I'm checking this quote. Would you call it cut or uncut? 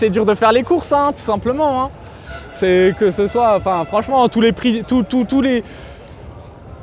uncut